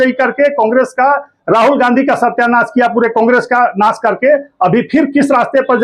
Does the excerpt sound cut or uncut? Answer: uncut